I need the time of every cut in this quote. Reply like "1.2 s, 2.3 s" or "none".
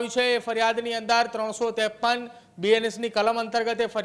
none

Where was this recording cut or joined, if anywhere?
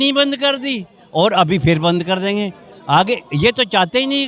none

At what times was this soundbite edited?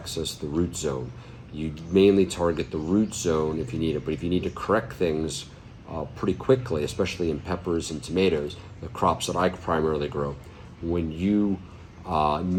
none

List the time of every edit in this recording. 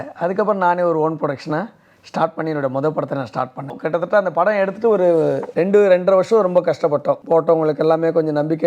3.8 s, 5.5 s, 7.2 s

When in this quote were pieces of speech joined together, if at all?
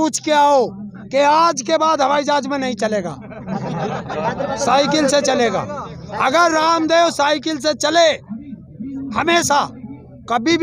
none

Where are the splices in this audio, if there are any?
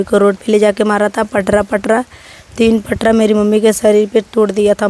none

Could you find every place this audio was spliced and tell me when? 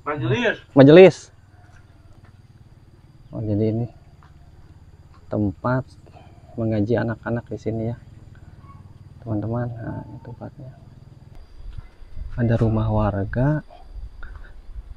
2.1 s, 11.4 s

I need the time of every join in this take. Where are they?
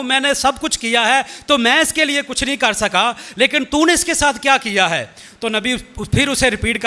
none

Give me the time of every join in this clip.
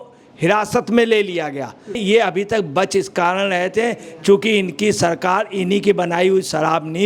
2.0 s

